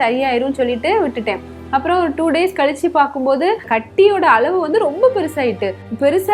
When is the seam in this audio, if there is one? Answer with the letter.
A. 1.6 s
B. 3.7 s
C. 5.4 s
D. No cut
B